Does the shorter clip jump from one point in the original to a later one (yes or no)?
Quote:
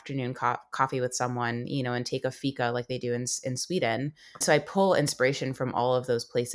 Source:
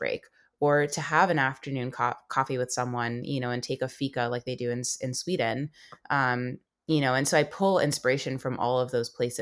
yes